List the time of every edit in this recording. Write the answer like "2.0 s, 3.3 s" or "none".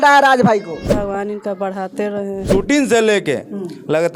0.9 s, 2.4 s